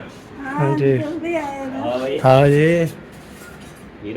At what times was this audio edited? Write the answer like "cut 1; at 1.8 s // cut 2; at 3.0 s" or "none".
cut 1; at 2.2 s